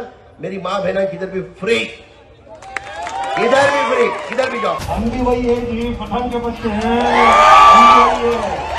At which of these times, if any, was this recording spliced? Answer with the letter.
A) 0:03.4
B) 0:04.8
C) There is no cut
B